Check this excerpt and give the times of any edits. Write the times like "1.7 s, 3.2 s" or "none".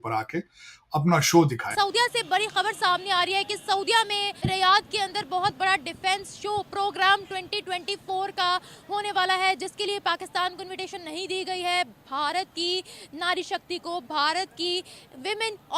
1.6 s